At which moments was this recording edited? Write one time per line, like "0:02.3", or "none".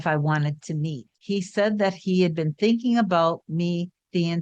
0:01.1